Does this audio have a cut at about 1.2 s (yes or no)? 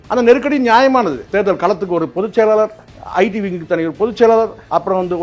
yes